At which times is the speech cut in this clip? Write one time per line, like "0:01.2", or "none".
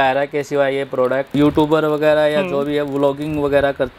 0:01.3